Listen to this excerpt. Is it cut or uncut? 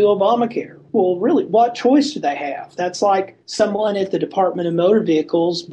uncut